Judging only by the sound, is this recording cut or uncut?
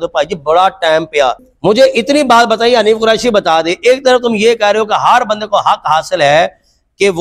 cut